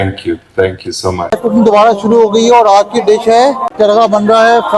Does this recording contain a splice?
yes; 2 cuts; at 1.4 s, 3.7 s

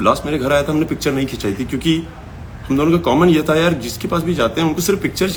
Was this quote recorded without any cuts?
yes; 0 cuts

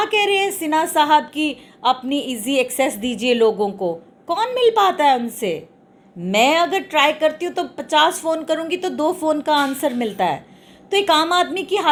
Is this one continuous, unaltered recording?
yes; 0 cuts

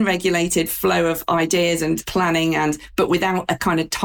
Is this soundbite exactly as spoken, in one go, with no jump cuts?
yes; 0 cuts

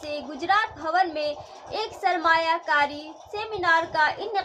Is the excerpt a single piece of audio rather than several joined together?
yes; 0 cuts

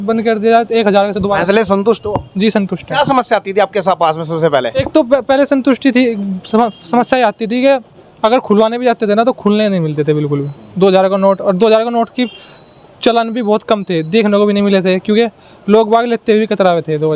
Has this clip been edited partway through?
no; 0 cuts

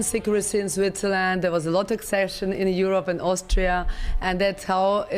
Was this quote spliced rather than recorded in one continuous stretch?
no; 0 cuts

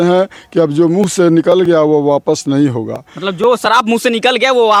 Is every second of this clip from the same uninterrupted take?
yes; 0 cuts

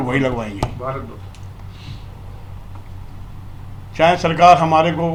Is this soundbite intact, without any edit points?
yes; 0 cuts

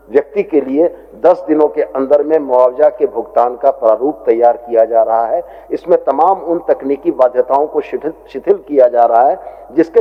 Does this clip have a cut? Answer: no; 0 cuts

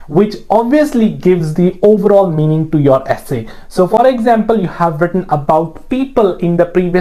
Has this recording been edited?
no; 0 cuts

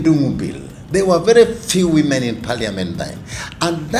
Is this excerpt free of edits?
yes; 0 cuts

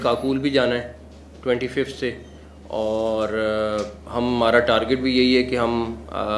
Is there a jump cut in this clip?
no; 0 cuts

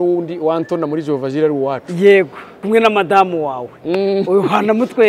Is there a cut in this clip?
yes; 1 cut; at 2.6 s

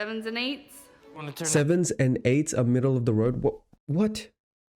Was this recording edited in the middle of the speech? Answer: yes; 1 cut; at 3.7 s

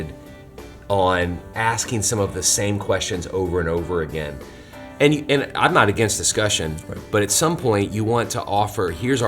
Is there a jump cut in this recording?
yes; 1 cut; at 1.5 s

